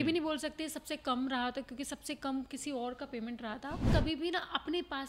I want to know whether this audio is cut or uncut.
cut